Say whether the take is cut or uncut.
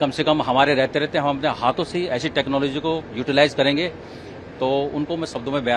uncut